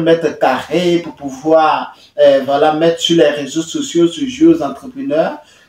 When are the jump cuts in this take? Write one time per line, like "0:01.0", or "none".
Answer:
none